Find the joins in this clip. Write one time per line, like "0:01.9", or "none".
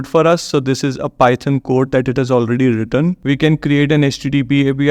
0:03.2

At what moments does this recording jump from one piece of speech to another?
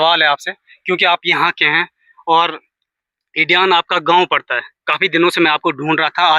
none

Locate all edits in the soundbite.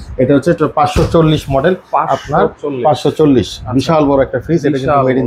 none

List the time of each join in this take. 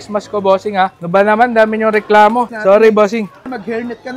0:02.5
0:03.4

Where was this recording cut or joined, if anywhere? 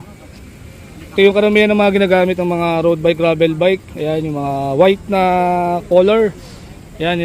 none

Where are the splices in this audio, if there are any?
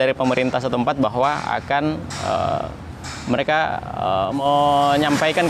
0:04.4

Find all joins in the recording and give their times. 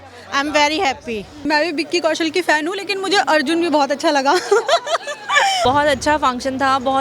0:01.4
0:05.6

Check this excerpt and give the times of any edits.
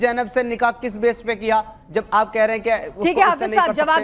none

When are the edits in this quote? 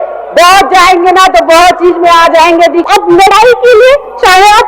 0:02.8

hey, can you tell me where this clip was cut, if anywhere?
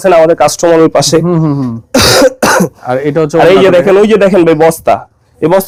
none

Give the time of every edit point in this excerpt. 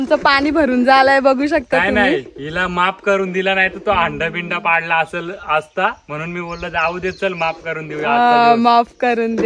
none

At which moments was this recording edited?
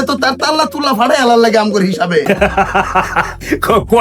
0:02.2

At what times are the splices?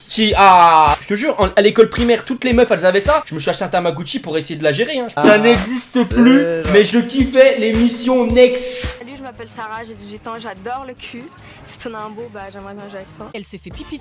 0:01.0
0:05.1
0:13.3

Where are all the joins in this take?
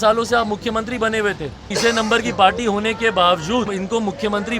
0:01.7
0:03.8

